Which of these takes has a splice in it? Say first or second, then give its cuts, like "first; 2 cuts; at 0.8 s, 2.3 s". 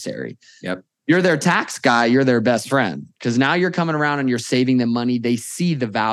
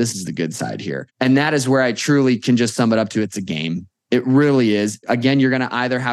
second; 2 cuts; at 1.1 s, 5.0 s